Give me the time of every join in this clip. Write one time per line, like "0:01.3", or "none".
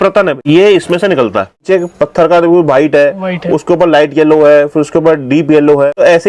0:01.6